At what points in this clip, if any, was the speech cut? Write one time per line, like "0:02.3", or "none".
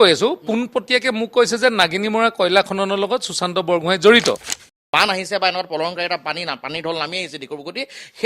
0:04.8